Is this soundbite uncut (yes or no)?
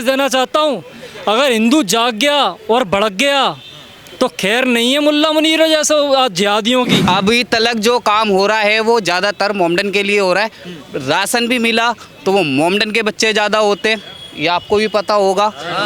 no